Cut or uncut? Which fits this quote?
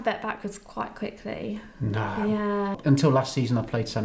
cut